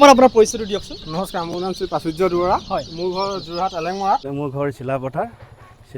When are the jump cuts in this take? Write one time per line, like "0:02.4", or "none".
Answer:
0:01.0
0:04.2